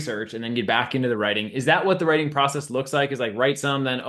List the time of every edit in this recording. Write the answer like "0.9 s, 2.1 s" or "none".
none